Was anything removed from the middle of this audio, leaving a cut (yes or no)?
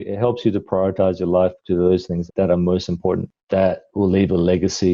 yes